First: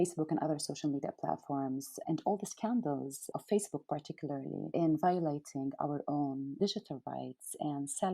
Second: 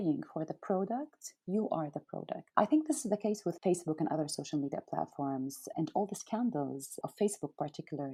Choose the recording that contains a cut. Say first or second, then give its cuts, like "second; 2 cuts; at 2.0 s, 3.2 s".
first; 1 cut; at 6.5 s